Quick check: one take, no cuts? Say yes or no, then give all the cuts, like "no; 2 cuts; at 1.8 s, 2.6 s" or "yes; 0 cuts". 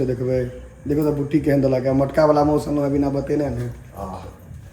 yes; 0 cuts